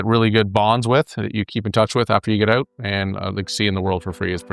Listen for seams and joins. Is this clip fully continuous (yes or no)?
no